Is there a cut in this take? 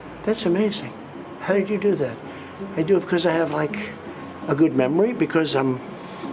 no; 0 cuts

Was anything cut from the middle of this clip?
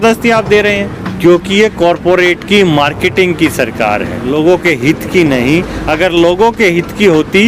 yes; 2 cuts; at 1.0 s, 4.2 s

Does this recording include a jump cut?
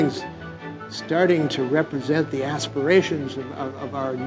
no; 0 cuts

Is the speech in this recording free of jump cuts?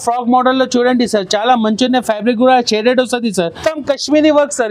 no; 1 cut; at 3.6 s

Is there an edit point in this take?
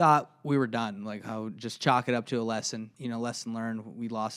yes; 1 cut; at 2.9 s

